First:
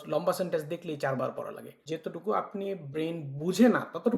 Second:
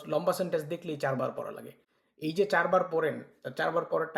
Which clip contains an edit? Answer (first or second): first